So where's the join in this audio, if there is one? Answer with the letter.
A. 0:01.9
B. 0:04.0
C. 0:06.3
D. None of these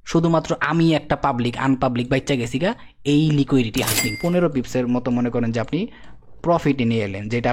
B